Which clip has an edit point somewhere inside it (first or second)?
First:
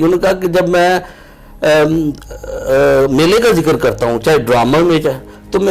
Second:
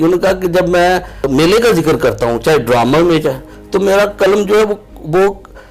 second